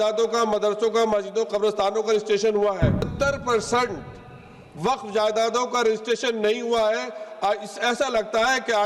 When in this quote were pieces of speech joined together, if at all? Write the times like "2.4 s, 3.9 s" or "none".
3.1 s